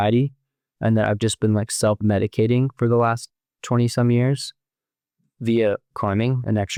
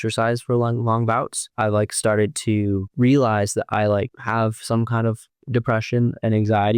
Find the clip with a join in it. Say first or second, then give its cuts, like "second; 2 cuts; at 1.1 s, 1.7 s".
second; 4 cuts; at 1.4 s, 2.9 s, 4.2 s, 5.3 s